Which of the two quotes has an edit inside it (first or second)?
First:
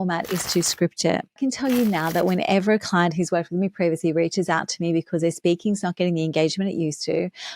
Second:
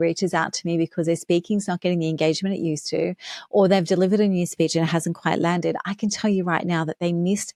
first